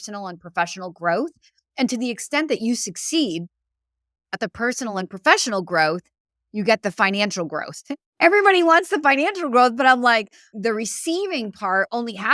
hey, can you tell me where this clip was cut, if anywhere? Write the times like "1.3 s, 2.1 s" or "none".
10.4 s